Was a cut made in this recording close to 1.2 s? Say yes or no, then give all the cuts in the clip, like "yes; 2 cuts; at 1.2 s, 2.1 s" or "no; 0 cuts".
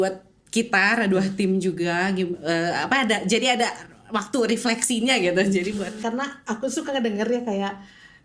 no; 1 cut; at 5.9 s